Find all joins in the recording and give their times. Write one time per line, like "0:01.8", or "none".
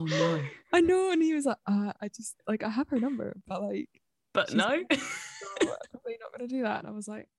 none